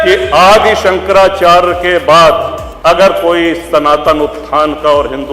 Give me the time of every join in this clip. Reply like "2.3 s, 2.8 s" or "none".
2.6 s